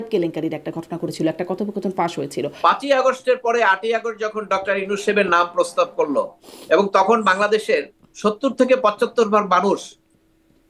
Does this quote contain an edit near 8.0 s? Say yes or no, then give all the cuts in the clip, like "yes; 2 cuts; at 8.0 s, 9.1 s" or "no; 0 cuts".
no; 1 cut; at 2.5 s